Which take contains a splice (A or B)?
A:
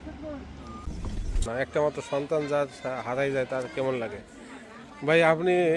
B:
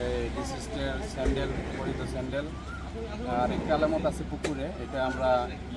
A